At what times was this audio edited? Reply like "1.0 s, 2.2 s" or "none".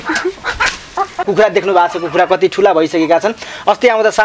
1.2 s